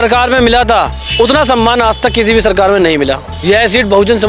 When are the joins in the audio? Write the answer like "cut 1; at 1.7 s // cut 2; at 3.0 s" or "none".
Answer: cut 1; at 1.0 s // cut 2; at 3.3 s